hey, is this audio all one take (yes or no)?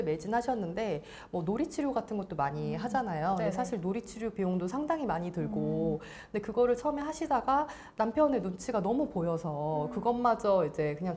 yes